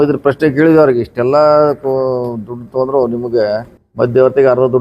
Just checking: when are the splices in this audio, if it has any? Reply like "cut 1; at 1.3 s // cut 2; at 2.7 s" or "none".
cut 1; at 3.8 s